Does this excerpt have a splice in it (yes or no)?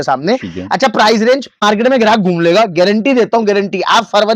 yes